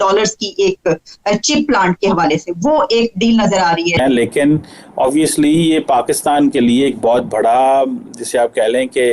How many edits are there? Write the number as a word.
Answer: one